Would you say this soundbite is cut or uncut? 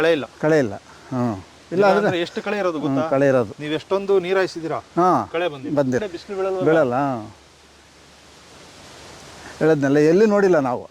cut